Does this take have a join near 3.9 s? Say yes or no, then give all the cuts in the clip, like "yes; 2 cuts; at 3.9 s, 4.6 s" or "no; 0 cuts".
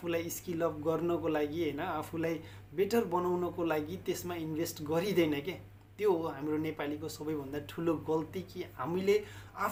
no; 0 cuts